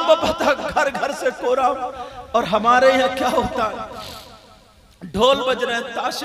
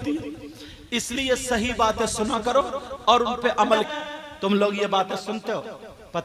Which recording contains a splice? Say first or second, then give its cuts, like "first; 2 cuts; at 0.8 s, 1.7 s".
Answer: second; 1 cut; at 3.9 s